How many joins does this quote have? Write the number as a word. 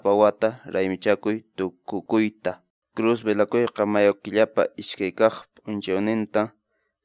one